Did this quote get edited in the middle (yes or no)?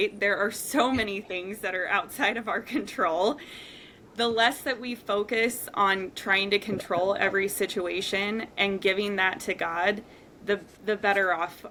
no